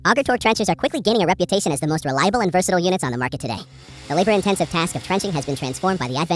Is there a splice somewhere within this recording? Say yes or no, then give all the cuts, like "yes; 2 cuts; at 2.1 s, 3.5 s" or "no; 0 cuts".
no; 0 cuts